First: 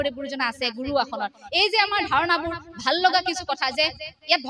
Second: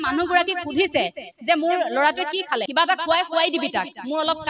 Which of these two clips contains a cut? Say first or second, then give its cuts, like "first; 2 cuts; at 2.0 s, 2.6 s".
second; 1 cut; at 2.7 s